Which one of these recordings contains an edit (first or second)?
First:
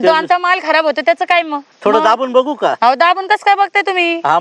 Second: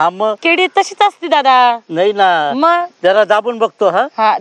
first